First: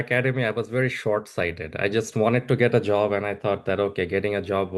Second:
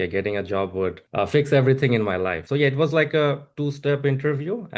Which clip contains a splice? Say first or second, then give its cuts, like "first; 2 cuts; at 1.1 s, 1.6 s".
second; 1 cut; at 2.4 s